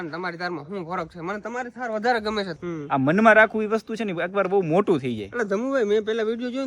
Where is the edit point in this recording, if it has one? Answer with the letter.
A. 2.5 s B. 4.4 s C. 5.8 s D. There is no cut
A